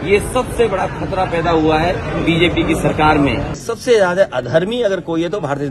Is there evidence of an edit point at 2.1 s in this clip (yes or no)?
no